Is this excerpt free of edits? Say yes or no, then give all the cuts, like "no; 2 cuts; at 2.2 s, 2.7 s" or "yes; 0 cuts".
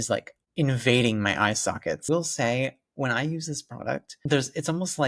no; 2 cuts; at 2.0 s, 4.1 s